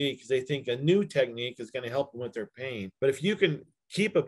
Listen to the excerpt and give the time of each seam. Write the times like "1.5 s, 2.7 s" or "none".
2.9 s